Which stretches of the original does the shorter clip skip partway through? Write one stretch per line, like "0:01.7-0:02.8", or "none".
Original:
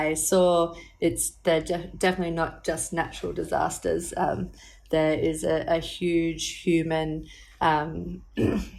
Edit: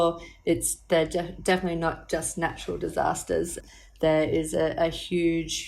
0:04.1-0:04.4